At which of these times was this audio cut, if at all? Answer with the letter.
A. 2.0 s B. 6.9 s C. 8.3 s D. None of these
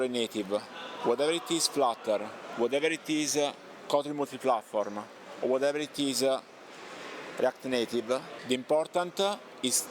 C